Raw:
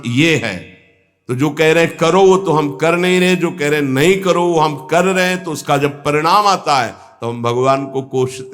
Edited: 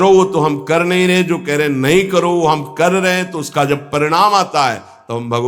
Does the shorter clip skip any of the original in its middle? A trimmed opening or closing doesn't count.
no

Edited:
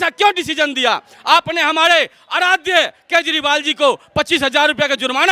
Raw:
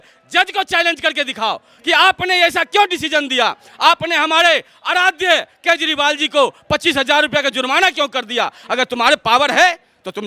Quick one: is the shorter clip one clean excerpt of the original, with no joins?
yes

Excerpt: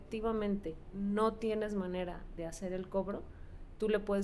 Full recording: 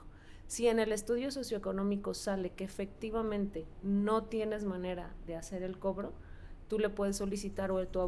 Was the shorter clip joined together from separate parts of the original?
no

